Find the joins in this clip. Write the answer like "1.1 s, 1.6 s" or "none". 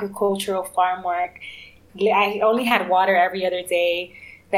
1.8 s